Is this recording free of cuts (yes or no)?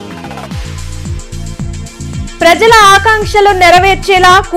no